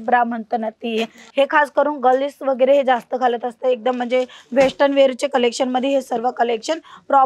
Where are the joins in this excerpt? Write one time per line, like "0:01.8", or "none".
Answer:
0:01.2